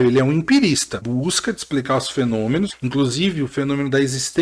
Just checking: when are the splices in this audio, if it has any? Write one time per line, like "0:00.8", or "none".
0:01.0
0:02.7